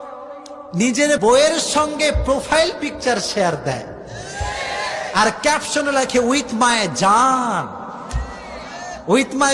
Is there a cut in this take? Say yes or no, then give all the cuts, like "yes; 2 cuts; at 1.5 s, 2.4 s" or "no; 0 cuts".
yes; 1 cut; at 1.2 s